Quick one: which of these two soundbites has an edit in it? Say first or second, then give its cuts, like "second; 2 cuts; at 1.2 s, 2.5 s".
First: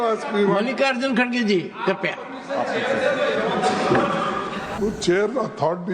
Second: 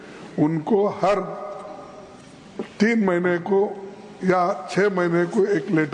first; 1 cut; at 4.7 s